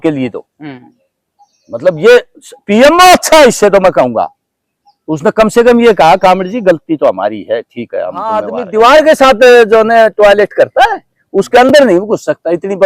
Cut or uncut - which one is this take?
cut